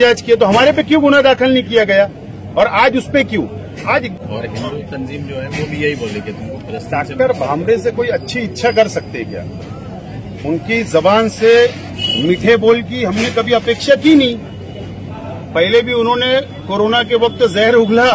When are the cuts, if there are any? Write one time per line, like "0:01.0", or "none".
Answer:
0:04.0